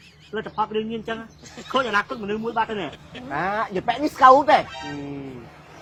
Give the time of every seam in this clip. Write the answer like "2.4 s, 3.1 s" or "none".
none